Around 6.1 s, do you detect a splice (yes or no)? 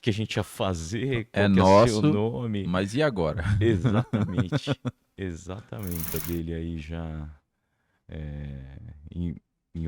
yes